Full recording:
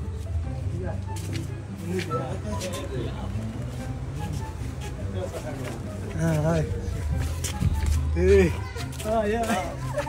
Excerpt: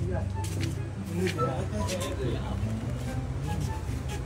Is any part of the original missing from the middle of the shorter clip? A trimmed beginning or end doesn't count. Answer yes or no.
no